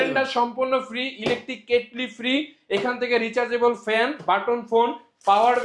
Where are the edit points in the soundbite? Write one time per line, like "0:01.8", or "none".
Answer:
none